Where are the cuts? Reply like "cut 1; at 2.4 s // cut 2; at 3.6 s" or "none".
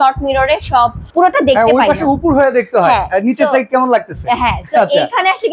cut 1; at 1.0 s